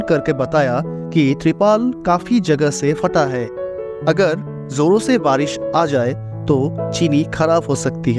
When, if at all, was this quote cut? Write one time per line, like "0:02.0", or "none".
none